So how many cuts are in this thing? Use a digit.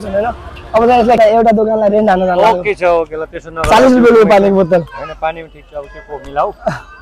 1